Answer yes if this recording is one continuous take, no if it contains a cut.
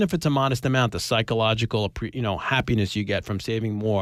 yes